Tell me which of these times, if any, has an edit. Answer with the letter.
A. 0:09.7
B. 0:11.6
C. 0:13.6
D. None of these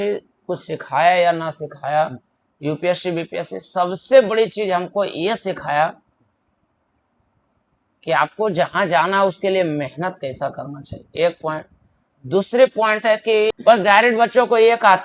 C